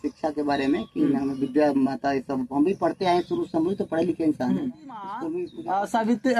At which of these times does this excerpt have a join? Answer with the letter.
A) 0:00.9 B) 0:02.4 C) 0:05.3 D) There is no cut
C